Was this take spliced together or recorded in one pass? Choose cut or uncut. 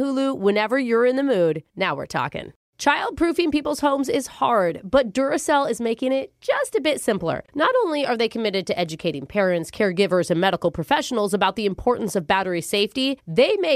cut